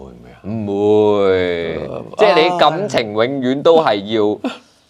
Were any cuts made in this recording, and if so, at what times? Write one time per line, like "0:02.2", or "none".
none